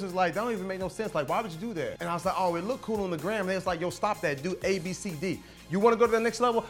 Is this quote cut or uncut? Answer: cut